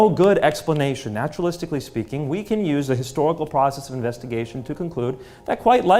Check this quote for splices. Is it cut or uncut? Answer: uncut